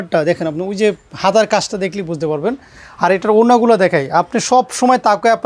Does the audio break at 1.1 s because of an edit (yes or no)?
no